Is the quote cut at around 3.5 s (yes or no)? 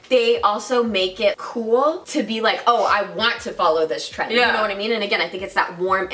no